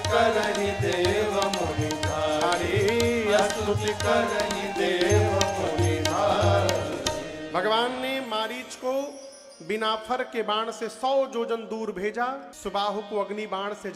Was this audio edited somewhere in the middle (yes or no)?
yes